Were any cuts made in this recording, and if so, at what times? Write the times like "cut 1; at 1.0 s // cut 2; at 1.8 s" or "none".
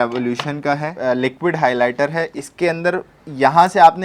cut 1; at 0.9 s // cut 2; at 2.4 s

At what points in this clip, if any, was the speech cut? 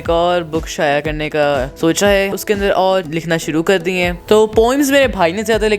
cut 1; at 1.7 s // cut 2; at 2.4 s // cut 3; at 3.1 s // cut 4; at 4.3 s

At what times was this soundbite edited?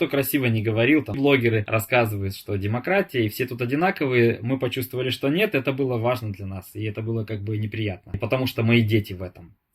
cut 1; at 1.7 s

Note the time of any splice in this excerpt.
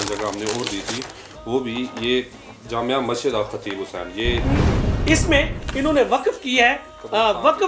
cut 1; at 4.6 s

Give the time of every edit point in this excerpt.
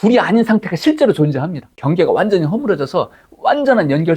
cut 1; at 1.7 s

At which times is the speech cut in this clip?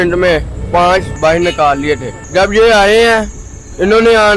cut 1; at 1.1 s // cut 2; at 2.1 s

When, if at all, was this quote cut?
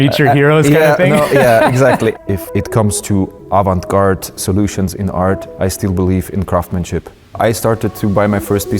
cut 1; at 2.1 s // cut 2; at 5.5 s // cut 3; at 7.3 s

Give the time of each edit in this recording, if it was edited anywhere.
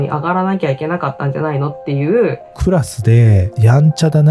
cut 1; at 2.5 s

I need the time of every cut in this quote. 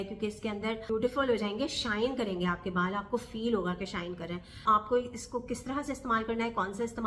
cut 1; at 0.8 s // cut 2; at 4.6 s

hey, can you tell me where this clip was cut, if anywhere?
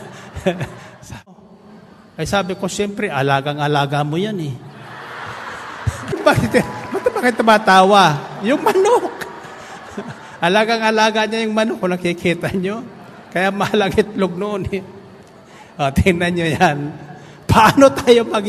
cut 1; at 1.3 s // cut 2; at 6.1 s

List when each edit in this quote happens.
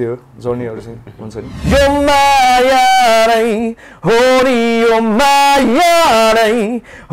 cut 1; at 1.5 s

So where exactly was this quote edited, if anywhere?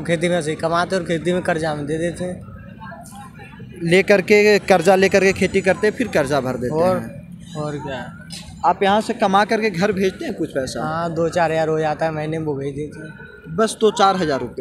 none

